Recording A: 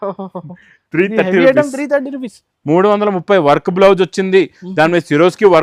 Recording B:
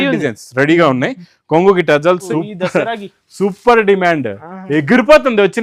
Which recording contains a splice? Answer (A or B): B